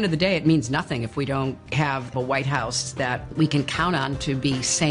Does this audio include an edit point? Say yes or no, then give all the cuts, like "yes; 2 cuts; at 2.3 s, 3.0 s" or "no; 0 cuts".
yes; 1 cut; at 2.1 s